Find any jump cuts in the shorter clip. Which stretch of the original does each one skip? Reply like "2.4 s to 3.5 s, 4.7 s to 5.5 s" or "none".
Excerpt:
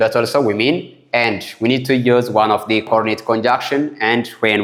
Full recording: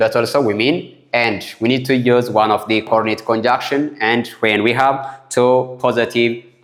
none